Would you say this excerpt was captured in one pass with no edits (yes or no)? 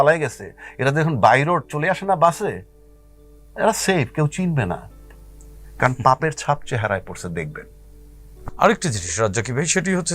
yes